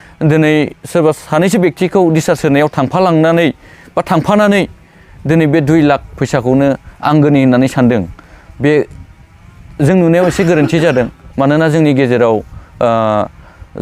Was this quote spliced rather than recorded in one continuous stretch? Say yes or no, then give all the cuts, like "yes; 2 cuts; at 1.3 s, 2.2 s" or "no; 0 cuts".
no; 0 cuts